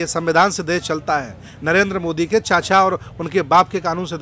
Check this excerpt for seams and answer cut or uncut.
uncut